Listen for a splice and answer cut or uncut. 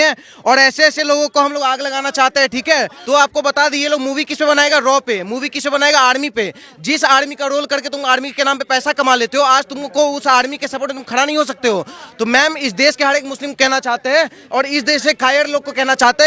uncut